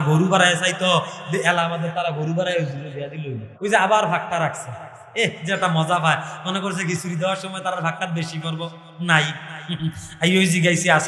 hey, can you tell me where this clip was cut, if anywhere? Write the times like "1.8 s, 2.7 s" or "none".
3.5 s

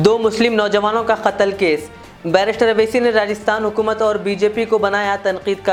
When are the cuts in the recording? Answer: none

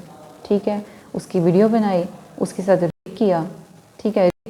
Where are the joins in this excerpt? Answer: none

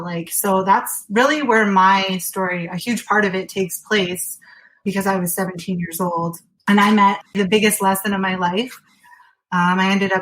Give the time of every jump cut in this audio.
4.8 s, 6.5 s, 7.2 s

